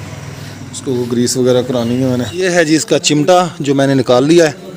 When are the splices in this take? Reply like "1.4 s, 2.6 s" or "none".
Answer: 2.3 s

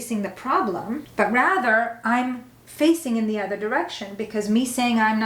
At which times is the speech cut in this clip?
1.0 s

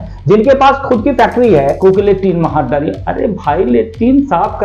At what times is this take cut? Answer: 1.8 s

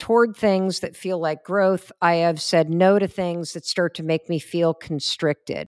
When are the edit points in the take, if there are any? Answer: none

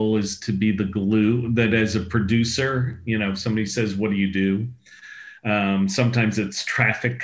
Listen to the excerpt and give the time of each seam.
none

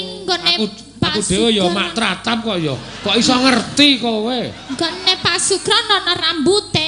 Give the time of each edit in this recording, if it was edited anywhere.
none

